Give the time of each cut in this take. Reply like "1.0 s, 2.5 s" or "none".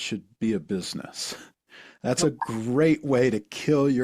none